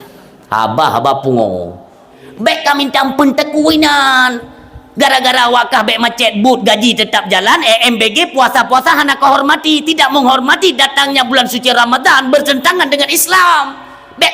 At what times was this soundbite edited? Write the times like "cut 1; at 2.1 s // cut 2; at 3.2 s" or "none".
cut 1; at 2.2 s